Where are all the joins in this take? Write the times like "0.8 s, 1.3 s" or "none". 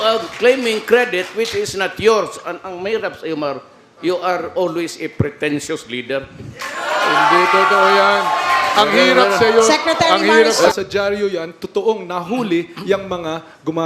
10.5 s